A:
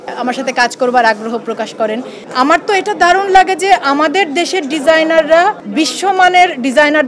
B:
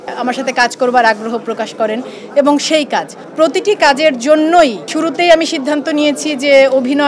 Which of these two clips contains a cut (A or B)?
A